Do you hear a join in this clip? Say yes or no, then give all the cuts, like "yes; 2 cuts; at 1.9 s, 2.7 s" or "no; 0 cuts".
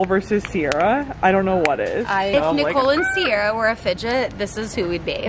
yes; 1 cut; at 2.3 s